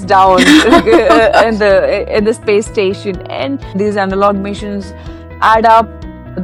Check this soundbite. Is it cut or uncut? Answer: uncut